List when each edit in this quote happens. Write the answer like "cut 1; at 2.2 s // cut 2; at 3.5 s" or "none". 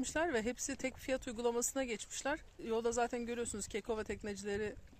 none